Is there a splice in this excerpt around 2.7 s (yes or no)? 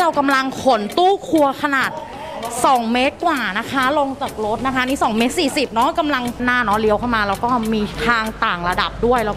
no